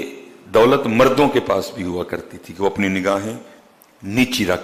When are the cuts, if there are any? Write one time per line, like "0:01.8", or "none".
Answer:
none